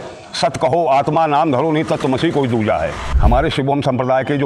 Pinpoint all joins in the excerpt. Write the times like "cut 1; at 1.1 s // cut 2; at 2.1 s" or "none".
cut 1; at 3.1 s